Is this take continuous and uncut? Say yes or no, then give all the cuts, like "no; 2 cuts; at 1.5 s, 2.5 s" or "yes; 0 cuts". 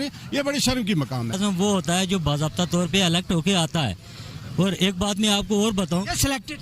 no; 1 cut; at 1.4 s